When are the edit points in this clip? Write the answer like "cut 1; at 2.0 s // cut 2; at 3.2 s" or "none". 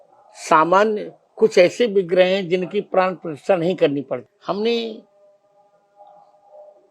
cut 1; at 4.3 s